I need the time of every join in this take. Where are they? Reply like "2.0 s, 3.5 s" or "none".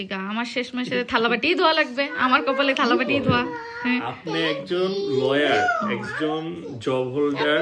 none